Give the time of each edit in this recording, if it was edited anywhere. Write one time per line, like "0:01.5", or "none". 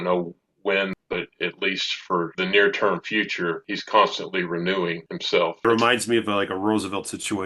0:05.6